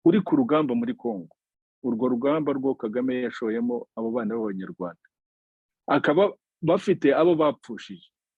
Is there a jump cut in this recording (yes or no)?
no